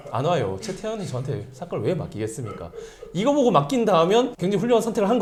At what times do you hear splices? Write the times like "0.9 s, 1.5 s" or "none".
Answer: none